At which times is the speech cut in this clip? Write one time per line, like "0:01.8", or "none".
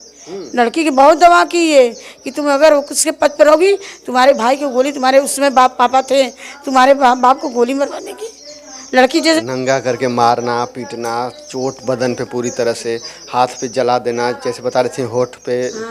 0:09.4